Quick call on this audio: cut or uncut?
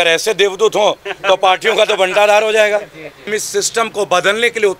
cut